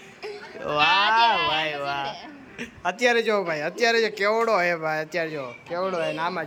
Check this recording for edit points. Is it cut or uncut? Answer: uncut